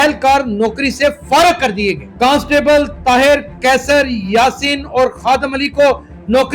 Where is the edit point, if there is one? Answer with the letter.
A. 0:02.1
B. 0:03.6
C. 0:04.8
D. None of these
A